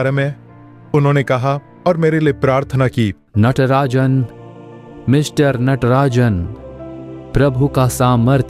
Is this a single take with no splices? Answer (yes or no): yes